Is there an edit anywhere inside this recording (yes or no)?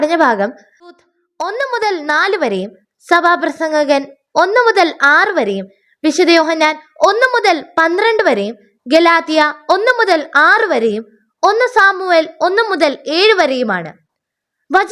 yes